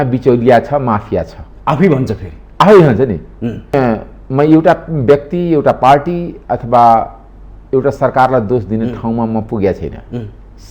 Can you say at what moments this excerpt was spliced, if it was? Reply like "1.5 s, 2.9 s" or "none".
3.7 s